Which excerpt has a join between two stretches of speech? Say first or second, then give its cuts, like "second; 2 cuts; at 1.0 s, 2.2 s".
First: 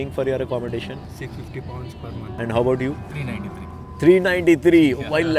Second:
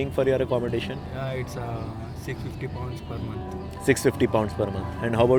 first; 2 cuts; at 1.1 s, 2.3 s